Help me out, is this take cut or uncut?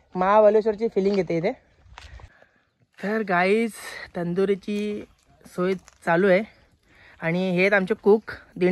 uncut